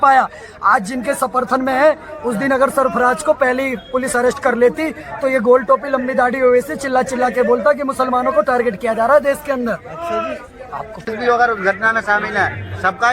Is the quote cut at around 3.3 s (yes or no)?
no